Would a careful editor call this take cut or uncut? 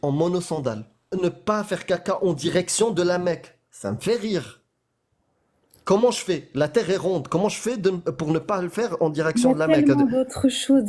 cut